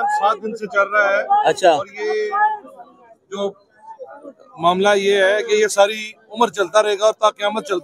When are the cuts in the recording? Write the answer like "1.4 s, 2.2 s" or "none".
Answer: none